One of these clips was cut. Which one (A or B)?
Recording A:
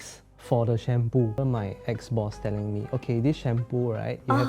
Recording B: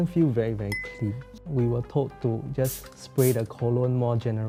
A